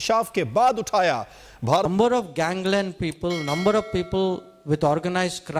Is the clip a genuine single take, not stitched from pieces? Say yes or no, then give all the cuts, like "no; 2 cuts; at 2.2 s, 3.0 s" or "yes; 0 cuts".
no; 1 cut; at 1.9 s